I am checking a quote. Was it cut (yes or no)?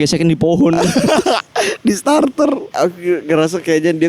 yes